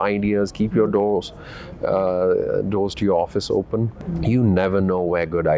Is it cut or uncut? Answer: cut